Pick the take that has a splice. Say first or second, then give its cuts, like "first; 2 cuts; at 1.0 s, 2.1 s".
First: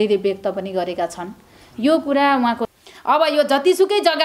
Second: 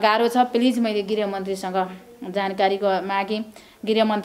first; 1 cut; at 2.7 s